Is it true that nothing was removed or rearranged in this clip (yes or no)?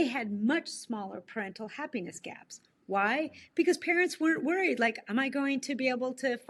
yes